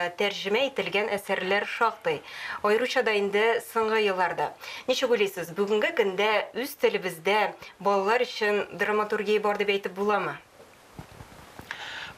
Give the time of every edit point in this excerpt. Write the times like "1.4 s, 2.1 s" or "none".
none